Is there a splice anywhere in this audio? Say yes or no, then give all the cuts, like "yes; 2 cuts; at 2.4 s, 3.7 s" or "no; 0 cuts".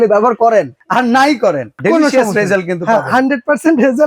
no; 0 cuts